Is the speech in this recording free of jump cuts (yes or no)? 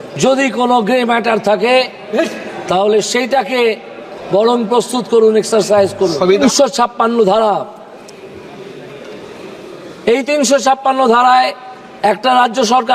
no